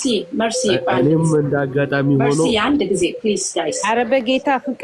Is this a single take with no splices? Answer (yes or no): yes